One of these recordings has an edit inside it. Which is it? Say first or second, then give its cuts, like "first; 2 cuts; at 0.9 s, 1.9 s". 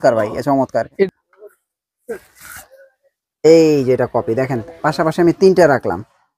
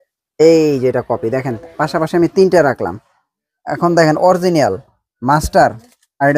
first; 1 cut; at 1.0 s